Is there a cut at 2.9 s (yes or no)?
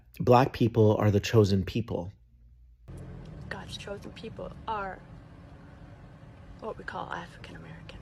yes